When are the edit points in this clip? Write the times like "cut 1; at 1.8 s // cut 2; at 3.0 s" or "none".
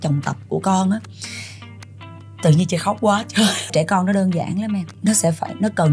cut 1; at 3.7 s // cut 2; at 4.9 s

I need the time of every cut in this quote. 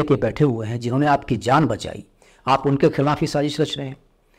none

